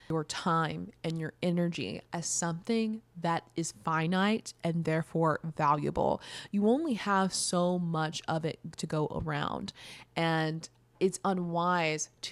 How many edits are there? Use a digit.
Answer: 1